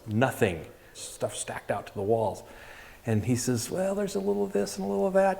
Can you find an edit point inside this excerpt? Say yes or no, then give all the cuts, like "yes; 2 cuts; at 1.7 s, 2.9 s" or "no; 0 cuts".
yes; 1 cut; at 1.0 s